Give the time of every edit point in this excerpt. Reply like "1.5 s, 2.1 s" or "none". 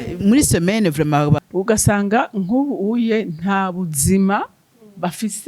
1.5 s

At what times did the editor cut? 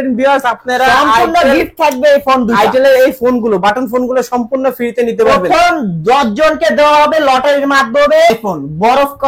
8.3 s

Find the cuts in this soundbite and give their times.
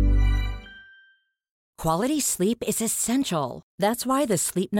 1.7 s

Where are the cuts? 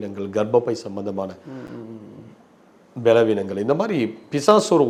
none

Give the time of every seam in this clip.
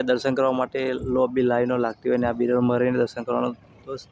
none

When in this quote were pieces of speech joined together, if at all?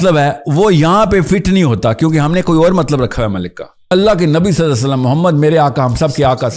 3.8 s

